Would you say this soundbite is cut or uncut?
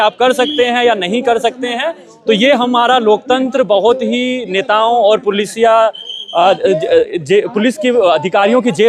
uncut